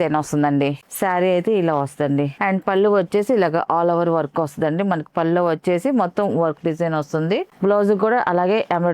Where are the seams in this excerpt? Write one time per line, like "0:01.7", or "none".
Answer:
0:00.9
0:02.3
0:07.5